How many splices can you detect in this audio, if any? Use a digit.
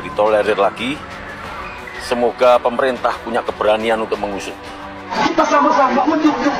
1